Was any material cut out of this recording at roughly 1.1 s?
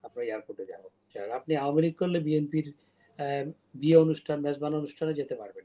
yes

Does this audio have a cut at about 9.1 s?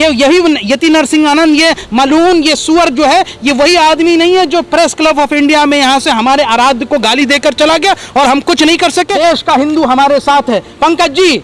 yes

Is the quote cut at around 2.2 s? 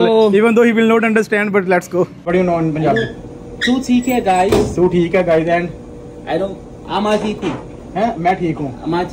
yes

